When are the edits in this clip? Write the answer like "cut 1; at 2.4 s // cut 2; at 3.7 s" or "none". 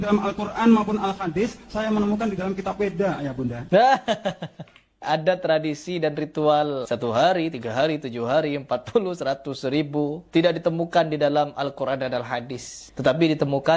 cut 1; at 3.6 s // cut 2; at 5.0 s // cut 3; at 6.8 s // cut 4; at 10.2 s

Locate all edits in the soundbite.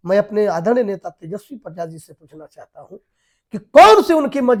none

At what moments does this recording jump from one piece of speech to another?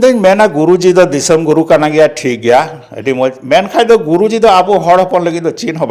none

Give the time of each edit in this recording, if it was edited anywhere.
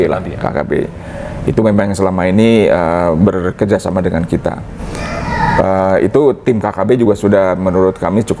none

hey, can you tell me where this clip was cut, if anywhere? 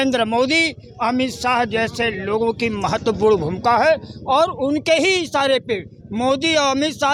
none

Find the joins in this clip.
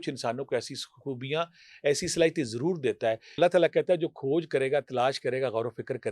cut 1; at 3.4 s

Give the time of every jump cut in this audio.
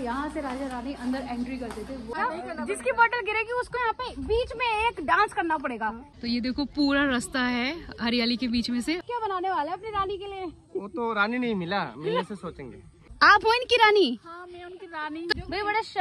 cut 1; at 2.1 s // cut 2; at 6.1 s // cut 3; at 9.1 s // cut 4; at 13.1 s // cut 5; at 15.3 s

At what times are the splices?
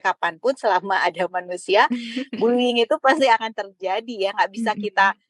none

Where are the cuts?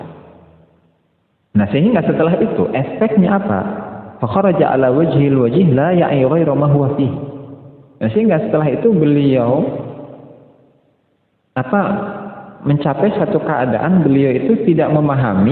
none

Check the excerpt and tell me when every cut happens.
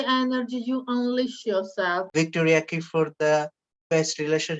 cut 1; at 2.1 s

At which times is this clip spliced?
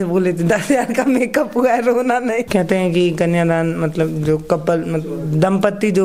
cut 1; at 2.5 s

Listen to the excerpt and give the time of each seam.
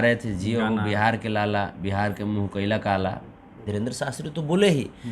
cut 1; at 3.6 s

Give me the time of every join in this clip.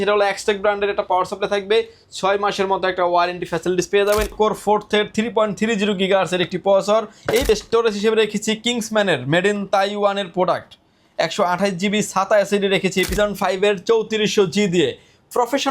cut 1; at 4.3 s // cut 2; at 7.5 s // cut 3; at 13.1 s

